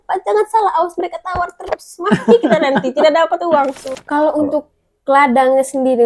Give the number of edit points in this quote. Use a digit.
1